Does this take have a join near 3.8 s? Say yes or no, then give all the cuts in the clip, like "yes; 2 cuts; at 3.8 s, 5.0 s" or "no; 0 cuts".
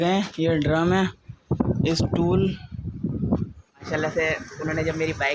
yes; 1 cut; at 3.8 s